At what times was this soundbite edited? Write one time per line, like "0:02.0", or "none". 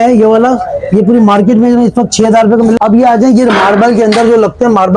0:02.8